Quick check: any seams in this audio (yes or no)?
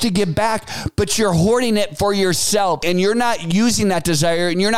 yes